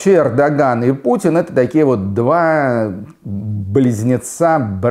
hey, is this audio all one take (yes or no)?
yes